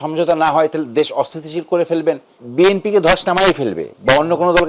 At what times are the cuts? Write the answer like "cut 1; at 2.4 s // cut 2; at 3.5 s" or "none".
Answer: cut 1; at 2.4 s